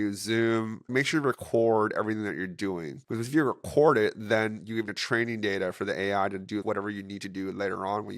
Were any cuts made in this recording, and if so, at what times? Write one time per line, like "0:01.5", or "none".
0:00.9
0:03.0
0:04.9
0:06.6